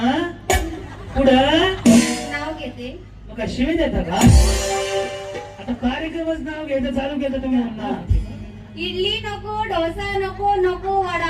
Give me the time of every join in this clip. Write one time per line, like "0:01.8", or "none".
0:08.1

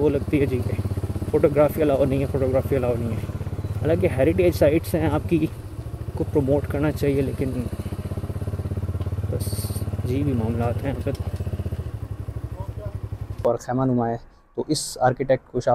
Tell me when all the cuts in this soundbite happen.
0:13.4

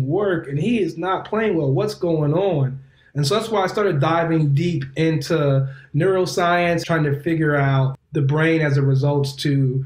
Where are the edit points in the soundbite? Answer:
0:06.8
0:07.9

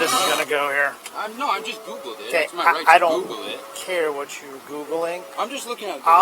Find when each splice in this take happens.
0:01.0

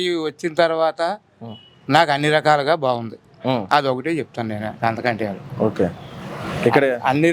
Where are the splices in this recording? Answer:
none

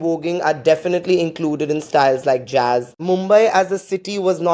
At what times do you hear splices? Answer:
0:02.9

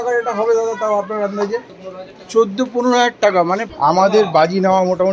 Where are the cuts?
0:01.7
0:03.6

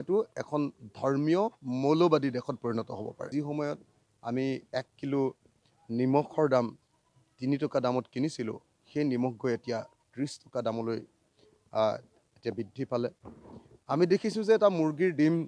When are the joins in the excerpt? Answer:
0:03.2

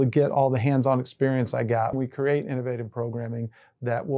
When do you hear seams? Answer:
0:01.9

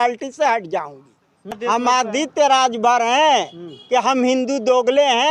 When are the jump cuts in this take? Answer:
0:01.6

